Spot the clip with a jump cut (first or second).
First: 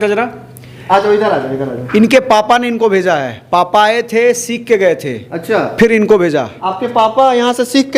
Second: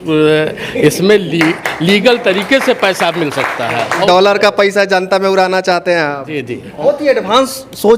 second